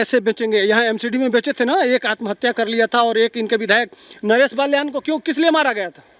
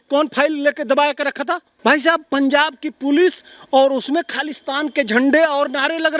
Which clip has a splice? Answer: second; 1 cut; at 1.7 s

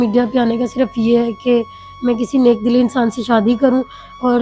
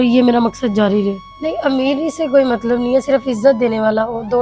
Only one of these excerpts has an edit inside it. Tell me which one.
second; 1 cut; at 1.3 s

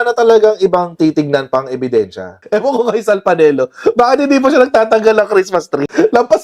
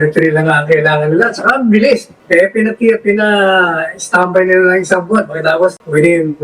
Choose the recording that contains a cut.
first; 1 cut; at 2.3 s

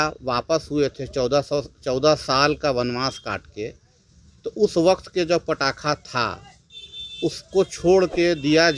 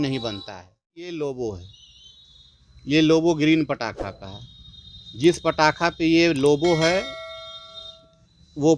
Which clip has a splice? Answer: second; 1 cut; at 1.0 s

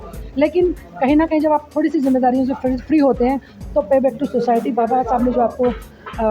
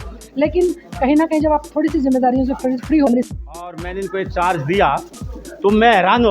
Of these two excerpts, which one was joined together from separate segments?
second; 1 cut; at 3.1 s

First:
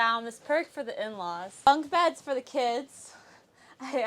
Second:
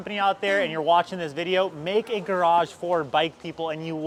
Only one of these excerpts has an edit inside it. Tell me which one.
first; 1 cut; at 1.7 s

